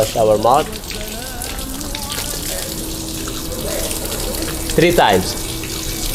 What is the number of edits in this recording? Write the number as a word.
zero